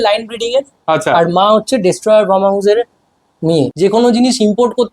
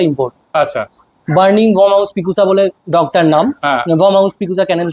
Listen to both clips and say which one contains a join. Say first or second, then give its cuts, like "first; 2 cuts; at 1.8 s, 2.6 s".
first; 1 cut; at 3.7 s